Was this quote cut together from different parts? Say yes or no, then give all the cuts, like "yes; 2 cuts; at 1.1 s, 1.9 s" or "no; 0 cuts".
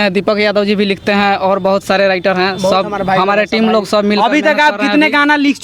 no; 0 cuts